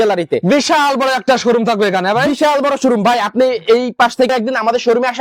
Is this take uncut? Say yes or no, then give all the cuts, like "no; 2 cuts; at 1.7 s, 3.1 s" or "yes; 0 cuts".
no; 1 cut; at 4.3 s